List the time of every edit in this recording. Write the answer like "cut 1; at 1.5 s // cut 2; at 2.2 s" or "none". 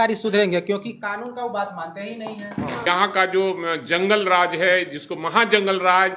cut 1; at 2.9 s